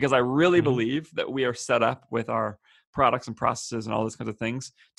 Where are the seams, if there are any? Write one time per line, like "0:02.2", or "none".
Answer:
none